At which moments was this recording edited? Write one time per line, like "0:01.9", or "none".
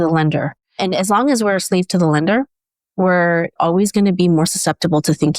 0:03.5